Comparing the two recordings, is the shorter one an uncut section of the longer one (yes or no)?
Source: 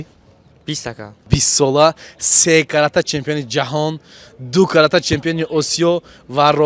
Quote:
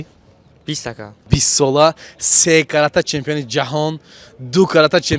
yes